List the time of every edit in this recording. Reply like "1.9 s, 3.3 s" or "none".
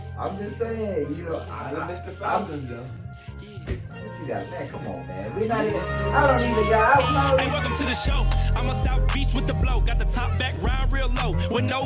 7.5 s